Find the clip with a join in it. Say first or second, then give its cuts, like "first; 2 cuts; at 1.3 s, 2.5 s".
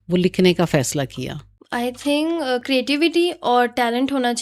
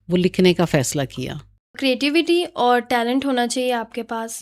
second; 1 cut; at 1.7 s